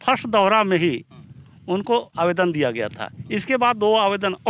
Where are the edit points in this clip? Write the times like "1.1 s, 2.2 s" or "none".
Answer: none

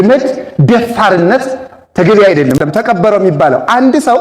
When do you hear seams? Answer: 2.6 s

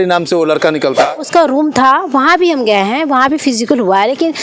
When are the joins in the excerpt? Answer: 1.2 s

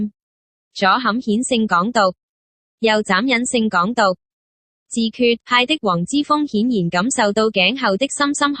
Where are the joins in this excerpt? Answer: 5.1 s

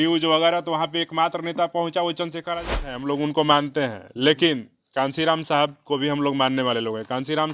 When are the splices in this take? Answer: 2.9 s

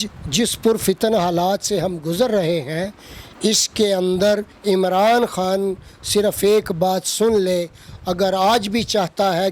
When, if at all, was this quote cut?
none

